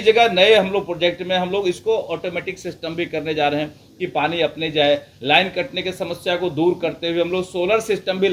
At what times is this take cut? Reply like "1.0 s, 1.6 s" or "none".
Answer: none